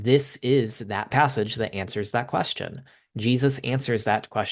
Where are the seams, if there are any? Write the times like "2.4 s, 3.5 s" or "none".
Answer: 1.1 s